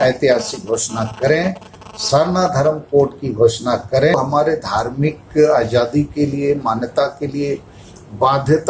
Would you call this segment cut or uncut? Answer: cut